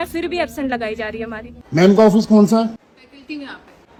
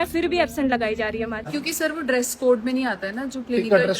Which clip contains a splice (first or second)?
second